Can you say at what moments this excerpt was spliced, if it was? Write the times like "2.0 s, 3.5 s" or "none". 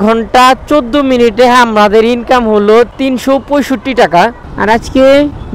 4.4 s